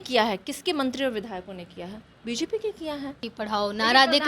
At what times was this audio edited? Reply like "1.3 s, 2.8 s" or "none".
3.3 s